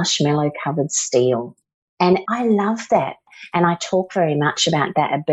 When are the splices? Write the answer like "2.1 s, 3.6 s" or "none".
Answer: 2.1 s, 3.2 s